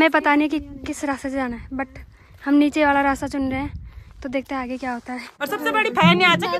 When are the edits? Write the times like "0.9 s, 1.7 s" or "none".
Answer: 5.3 s